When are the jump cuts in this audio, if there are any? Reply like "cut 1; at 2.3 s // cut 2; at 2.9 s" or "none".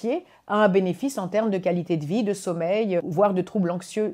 cut 1; at 3.1 s